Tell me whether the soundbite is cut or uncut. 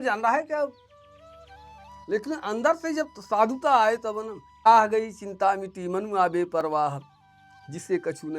cut